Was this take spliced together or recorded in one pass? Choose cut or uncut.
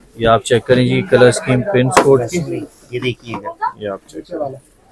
uncut